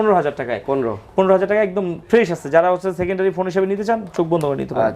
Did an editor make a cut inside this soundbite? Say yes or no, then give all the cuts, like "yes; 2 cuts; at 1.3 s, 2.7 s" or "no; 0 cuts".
no; 0 cuts